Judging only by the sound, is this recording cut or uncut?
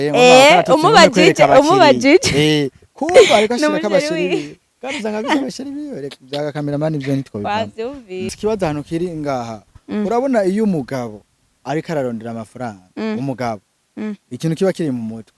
cut